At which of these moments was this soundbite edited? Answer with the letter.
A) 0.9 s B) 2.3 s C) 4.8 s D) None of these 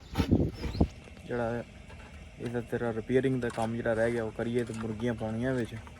A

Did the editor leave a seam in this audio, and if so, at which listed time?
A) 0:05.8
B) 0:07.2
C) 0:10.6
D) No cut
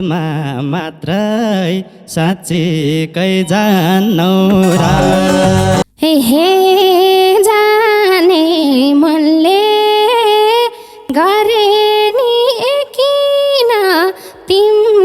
A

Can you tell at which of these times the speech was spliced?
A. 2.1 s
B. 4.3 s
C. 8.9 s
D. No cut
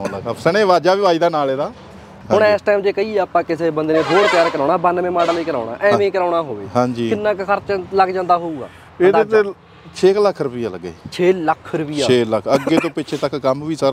A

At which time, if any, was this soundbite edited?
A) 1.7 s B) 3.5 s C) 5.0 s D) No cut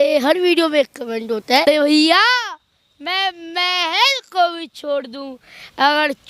A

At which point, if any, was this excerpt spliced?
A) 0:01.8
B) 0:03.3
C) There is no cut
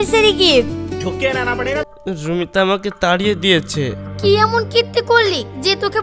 A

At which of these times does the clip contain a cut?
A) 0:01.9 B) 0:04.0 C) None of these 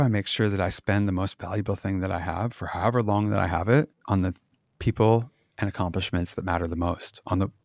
B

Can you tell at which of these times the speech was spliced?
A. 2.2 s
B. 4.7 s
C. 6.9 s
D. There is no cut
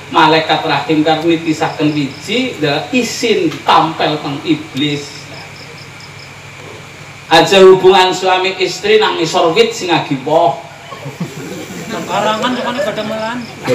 C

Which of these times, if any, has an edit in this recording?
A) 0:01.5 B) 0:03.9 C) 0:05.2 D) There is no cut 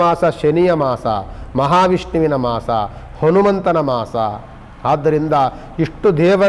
D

